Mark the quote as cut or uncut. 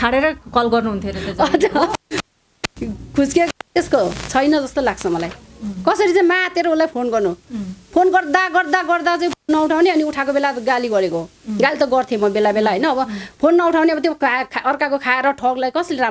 uncut